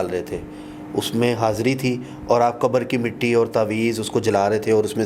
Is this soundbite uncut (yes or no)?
yes